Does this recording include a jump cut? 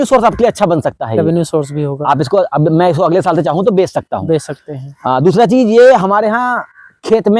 no; 0 cuts

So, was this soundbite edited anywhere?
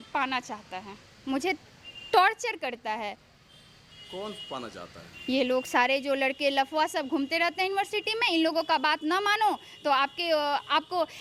no; 0 cuts

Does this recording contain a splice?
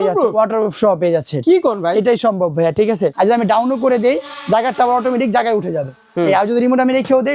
yes; 1 cut; at 3.1 s

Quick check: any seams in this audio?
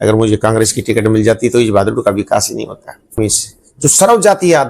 yes; 1 cut; at 3.2 s

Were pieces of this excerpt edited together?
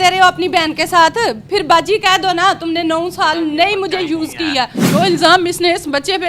yes; 1 cut; at 4.9 s

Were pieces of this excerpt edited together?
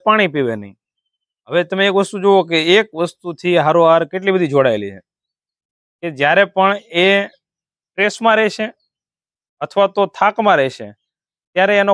no; 0 cuts

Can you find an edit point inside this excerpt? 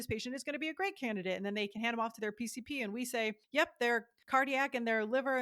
yes; 2 cuts; at 3.4 s, 4.1 s

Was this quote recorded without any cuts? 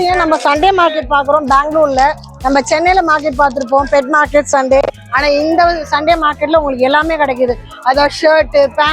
yes; 0 cuts

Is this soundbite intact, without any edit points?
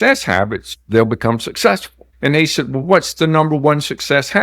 yes; 0 cuts

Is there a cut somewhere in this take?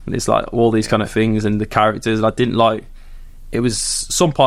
no; 0 cuts

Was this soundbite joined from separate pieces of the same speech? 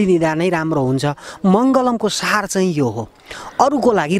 no; 0 cuts

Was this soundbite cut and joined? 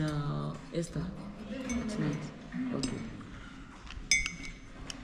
no; 0 cuts

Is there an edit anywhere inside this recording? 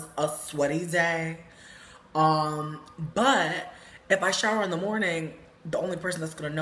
yes; 1 cut; at 2.8 s

